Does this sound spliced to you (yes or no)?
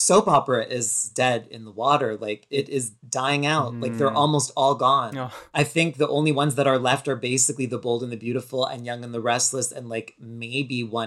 yes